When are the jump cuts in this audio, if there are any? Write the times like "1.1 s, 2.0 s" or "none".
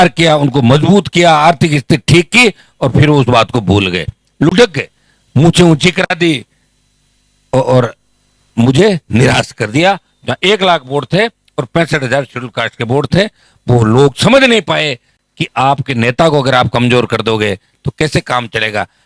none